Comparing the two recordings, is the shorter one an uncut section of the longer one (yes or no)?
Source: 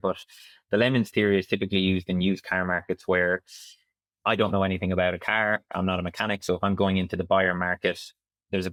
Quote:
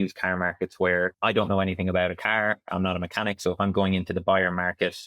no